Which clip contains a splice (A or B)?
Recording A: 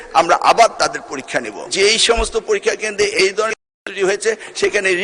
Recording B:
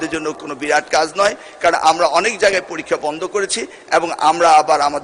A